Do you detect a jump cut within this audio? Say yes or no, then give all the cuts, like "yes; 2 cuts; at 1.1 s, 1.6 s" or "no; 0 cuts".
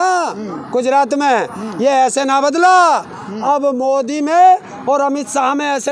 no; 0 cuts